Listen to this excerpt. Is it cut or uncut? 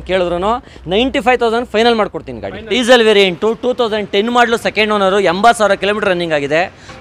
cut